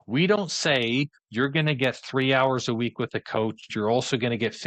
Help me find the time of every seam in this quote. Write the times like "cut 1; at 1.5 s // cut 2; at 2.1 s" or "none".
cut 1; at 3.7 s